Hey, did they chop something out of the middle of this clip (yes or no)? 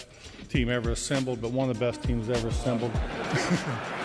yes